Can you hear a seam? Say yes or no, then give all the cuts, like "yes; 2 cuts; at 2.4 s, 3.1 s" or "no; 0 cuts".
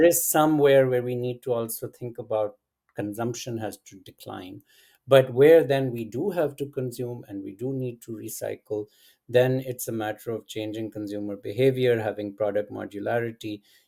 no; 0 cuts